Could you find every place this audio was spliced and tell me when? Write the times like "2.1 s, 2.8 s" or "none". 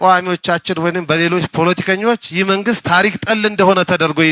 none